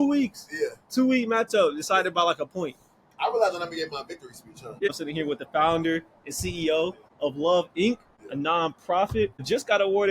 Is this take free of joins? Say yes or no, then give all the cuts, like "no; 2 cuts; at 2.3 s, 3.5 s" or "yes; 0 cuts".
no; 1 cut; at 4.9 s